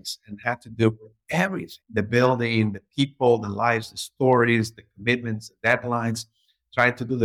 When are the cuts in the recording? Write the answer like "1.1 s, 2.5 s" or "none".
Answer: 1.7 s